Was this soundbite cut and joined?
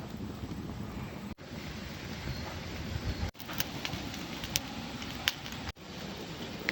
yes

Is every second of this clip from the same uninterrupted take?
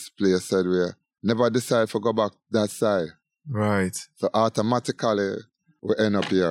yes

